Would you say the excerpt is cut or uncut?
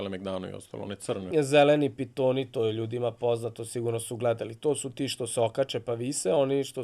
cut